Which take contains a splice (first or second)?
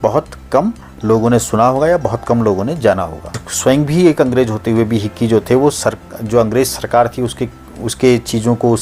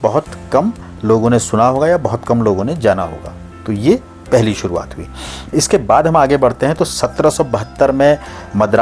first